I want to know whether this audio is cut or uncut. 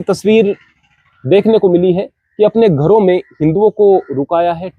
uncut